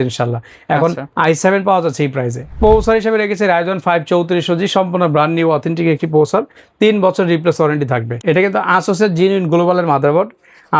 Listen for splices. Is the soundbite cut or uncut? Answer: cut